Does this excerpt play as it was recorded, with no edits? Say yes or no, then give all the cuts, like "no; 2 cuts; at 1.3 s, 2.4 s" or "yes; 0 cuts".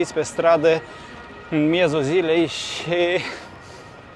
yes; 0 cuts